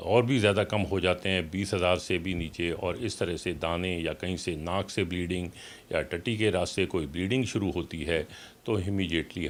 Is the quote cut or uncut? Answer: uncut